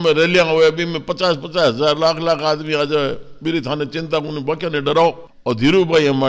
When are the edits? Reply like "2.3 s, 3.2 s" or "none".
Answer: 5.3 s